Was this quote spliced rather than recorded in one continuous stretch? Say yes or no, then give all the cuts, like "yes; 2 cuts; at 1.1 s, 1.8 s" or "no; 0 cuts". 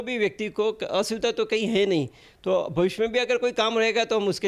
no; 0 cuts